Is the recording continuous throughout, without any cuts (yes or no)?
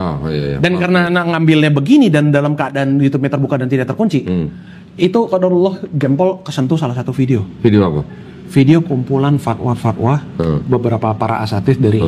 yes